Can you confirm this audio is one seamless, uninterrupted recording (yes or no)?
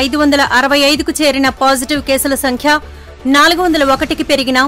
yes